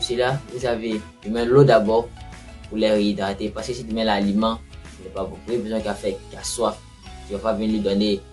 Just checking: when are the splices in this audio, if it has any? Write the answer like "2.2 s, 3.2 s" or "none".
1.1 s